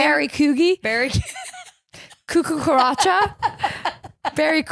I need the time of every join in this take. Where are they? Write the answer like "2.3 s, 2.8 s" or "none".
none